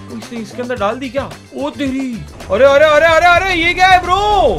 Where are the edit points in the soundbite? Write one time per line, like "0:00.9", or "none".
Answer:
0:02.3